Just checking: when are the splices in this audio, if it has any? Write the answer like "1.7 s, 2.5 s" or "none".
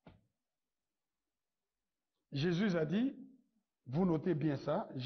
none